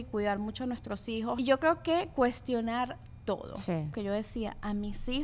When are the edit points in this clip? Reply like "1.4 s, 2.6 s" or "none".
1.4 s, 3.9 s